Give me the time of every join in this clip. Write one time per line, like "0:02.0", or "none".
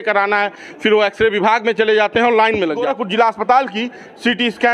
0:02.9